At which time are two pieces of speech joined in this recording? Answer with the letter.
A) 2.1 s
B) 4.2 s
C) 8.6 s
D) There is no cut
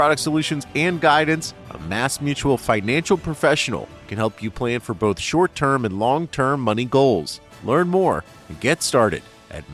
D